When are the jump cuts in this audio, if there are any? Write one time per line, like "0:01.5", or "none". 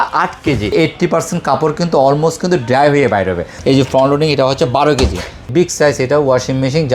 0:00.7
0:03.5
0:05.4